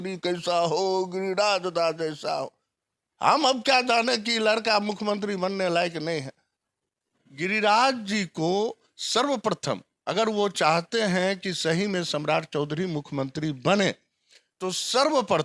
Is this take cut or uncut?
cut